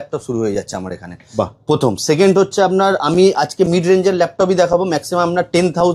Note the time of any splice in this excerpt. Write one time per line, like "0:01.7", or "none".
none